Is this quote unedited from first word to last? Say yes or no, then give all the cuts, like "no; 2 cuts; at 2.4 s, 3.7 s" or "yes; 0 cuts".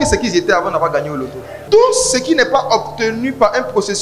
no; 1 cut; at 1.5 s